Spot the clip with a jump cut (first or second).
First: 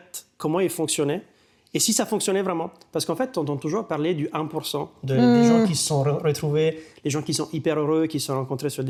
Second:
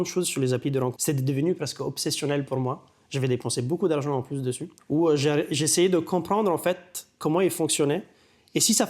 second